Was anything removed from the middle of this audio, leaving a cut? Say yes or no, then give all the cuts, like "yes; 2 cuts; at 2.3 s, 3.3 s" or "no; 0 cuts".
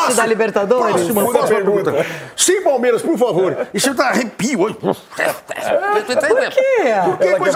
no; 0 cuts